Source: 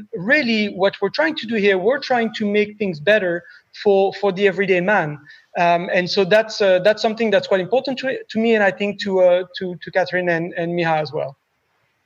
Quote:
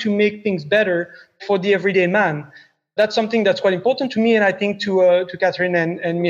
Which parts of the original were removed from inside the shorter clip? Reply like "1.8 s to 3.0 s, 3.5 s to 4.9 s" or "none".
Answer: 3.8 s to 4.1 s, 5.7 s to 6.8 s, 7.9 s to 8.3 s, 9.5 s to 9.8 s

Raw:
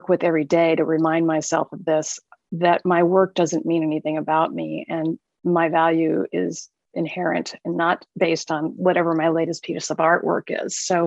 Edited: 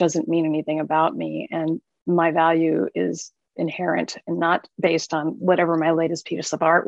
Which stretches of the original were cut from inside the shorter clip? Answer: none

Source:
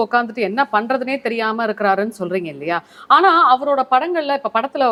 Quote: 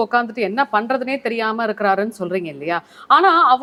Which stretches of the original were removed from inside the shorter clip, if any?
none

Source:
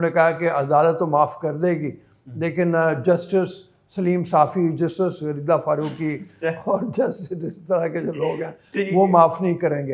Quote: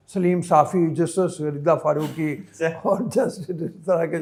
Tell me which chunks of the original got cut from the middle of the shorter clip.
none

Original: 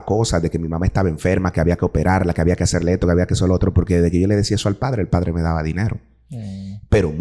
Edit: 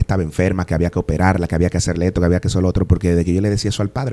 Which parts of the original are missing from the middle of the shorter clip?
none

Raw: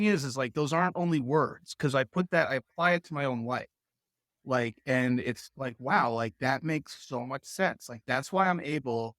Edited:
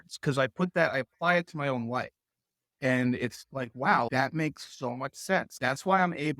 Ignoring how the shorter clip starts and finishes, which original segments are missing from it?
4.3 s to 4.8 s, 6.1 s to 6.4 s, 7.8 s to 8.0 s

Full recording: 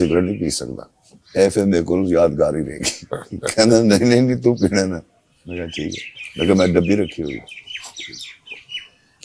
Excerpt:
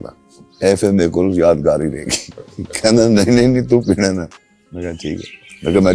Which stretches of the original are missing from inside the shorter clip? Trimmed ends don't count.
none

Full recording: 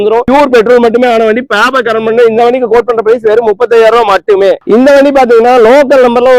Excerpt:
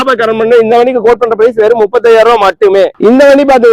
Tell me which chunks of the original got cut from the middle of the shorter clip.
none

